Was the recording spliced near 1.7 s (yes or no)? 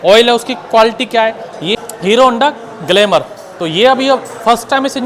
yes